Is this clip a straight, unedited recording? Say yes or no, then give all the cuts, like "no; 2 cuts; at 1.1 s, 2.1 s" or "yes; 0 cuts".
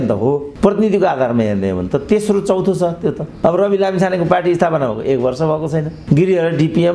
yes; 0 cuts